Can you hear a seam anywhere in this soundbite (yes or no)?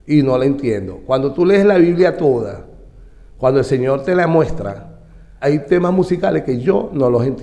yes